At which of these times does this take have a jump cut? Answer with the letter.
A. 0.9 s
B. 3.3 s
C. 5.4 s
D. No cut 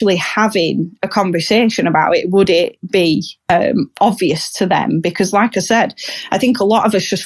B